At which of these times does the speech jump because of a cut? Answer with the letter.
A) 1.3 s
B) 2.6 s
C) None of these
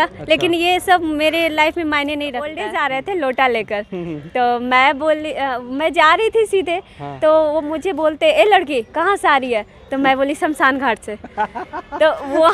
B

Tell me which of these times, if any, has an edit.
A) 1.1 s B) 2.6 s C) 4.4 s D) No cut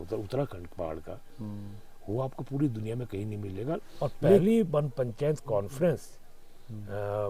C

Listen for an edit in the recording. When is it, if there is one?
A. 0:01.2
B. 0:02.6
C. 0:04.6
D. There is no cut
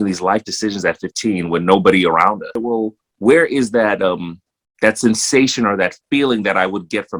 B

